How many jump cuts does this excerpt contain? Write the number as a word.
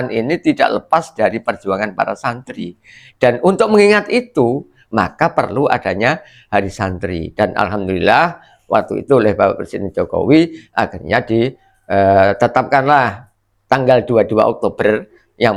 zero